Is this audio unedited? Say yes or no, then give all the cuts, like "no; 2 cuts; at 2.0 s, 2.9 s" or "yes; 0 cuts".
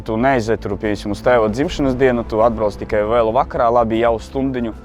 yes; 0 cuts